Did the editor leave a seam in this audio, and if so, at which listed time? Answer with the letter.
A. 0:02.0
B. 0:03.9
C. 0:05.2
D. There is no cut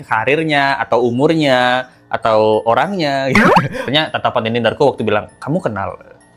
B